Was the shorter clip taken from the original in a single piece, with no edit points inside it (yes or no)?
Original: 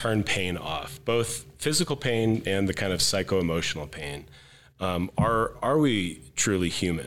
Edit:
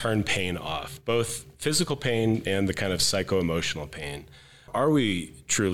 no